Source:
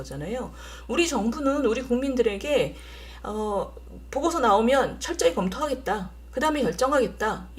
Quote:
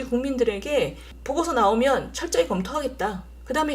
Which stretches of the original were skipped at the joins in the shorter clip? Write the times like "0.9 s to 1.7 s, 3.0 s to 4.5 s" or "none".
2.9 s to 3.9 s